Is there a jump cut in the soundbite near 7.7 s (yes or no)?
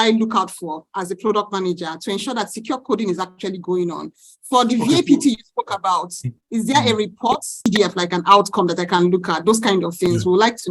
yes